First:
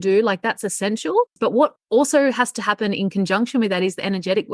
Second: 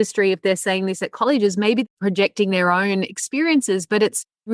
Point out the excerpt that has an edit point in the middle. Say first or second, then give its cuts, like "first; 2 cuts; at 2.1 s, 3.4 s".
first; 1 cut; at 1.3 s